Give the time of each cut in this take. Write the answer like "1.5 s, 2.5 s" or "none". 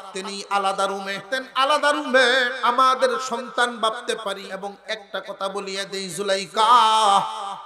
1.2 s, 2.5 s, 4.5 s